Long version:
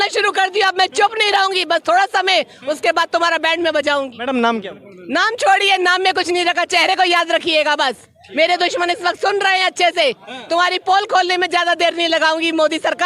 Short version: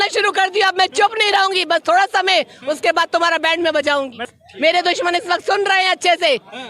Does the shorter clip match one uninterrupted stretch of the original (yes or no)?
no